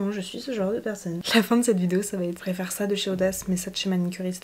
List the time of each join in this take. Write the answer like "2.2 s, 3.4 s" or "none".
0.9 s, 2.4 s